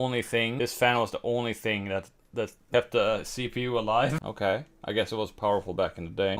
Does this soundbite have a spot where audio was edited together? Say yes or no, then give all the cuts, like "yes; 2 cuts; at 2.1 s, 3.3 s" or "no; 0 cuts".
yes; 1 cut; at 4.2 s